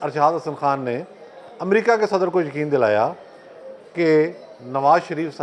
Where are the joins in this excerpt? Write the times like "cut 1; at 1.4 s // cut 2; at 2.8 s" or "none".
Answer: none